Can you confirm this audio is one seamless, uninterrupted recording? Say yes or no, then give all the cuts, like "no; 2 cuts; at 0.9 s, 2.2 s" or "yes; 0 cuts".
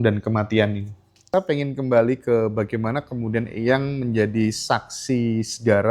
no; 1 cut; at 1.3 s